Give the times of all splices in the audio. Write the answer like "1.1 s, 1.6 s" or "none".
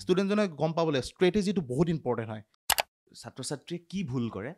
2.7 s